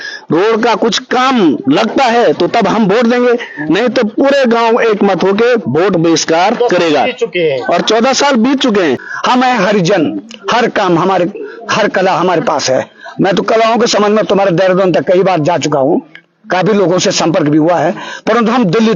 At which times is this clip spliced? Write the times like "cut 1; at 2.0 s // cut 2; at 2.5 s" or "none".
cut 1; at 9.1 s